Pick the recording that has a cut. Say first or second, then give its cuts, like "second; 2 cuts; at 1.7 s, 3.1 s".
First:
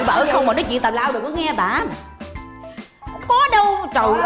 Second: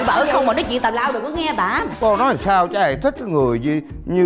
second; 1 cut; at 1.9 s